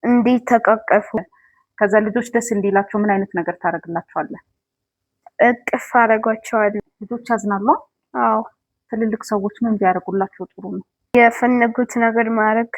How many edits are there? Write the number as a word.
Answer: three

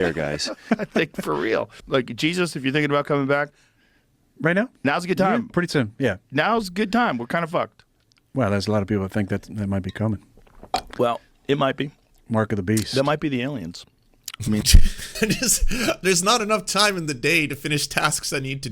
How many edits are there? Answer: one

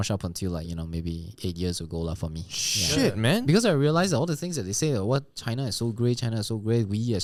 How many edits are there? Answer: zero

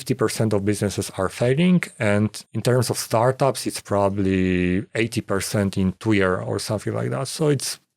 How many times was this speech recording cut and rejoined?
one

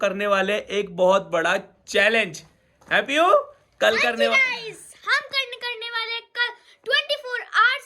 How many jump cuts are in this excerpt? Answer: zero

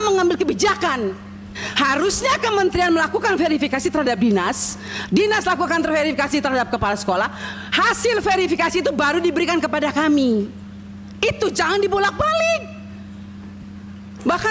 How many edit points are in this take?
one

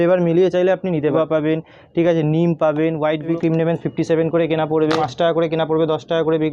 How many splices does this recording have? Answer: three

